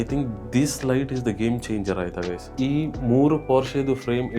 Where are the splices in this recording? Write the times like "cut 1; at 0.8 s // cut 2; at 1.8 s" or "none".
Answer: cut 1; at 2.5 s

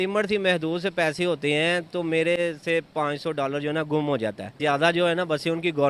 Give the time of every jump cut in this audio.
cut 1; at 4.6 s

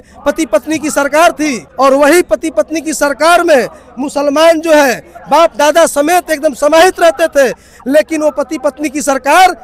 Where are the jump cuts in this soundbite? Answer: cut 1; at 1.6 s

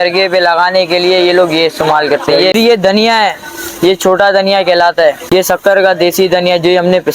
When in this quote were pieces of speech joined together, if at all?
cut 1; at 2.5 s // cut 2; at 5.2 s

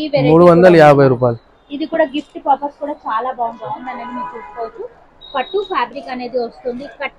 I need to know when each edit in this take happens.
cut 1; at 3.8 s

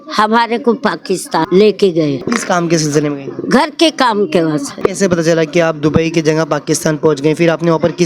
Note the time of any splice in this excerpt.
cut 1; at 1.4 s // cut 2; at 2.2 s // cut 3; at 4.7 s

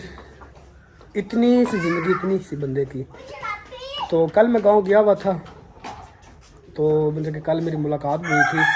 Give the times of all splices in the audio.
none

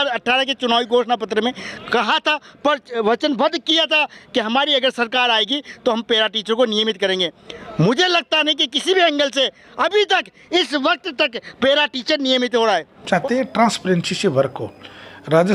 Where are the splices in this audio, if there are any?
cut 1; at 13.0 s

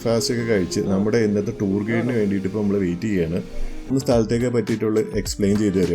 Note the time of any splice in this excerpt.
cut 1; at 3.9 s

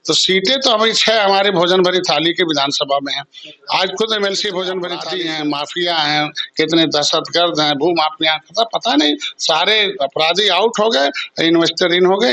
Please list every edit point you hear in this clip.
cut 1; at 5.1 s

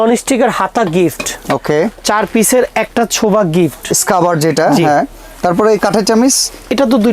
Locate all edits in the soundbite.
none

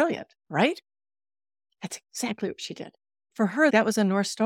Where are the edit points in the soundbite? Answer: cut 1; at 1.1 s // cut 2; at 3.4 s

